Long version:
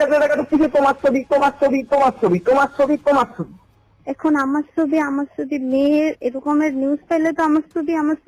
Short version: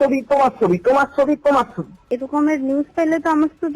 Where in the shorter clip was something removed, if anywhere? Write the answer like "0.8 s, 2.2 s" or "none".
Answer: 2.1 s